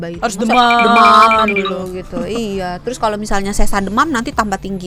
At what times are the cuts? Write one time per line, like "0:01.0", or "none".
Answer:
none